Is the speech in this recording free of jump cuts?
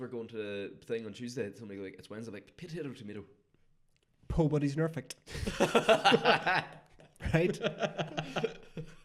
yes; 0 cuts

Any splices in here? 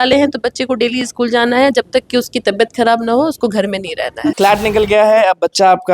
yes; 1 cut; at 4.3 s

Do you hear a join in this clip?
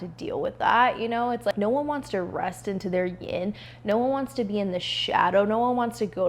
yes; 1 cut; at 1.5 s

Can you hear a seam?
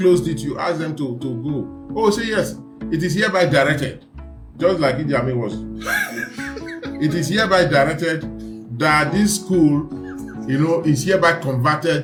no; 0 cuts

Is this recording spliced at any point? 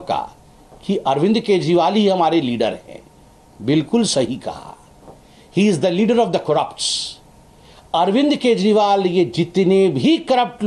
no; 0 cuts

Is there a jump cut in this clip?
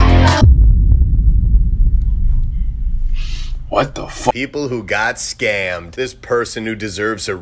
yes; 1 cut; at 4.3 s

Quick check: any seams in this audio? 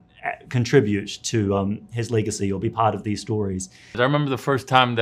yes; 1 cut; at 3.9 s

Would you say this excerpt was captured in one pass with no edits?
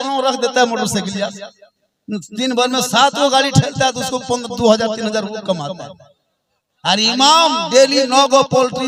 yes; 0 cuts

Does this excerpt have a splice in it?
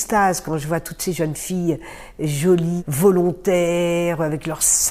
yes; 1 cut; at 2.8 s

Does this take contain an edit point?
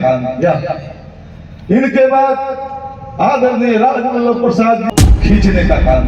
yes; 1 cut; at 4.8 s

